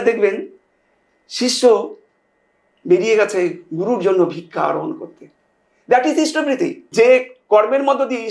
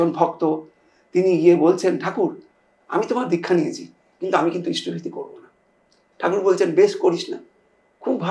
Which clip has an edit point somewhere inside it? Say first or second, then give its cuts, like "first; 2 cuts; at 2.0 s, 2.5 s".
first; 1 cut; at 6.8 s